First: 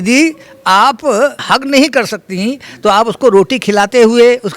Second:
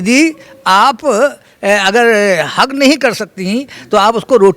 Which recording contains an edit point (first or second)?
first